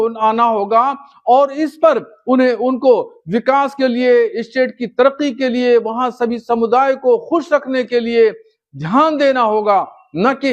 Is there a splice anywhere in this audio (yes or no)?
no